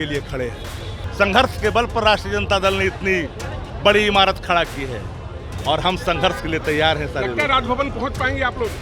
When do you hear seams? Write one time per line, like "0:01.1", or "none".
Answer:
0:01.0